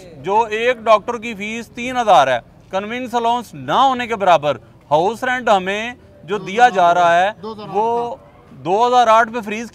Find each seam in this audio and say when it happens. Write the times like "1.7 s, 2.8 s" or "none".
none